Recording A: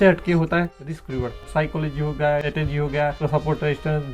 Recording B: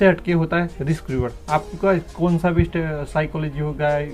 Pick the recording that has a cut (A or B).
A